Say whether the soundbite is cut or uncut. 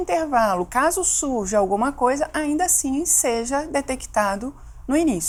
uncut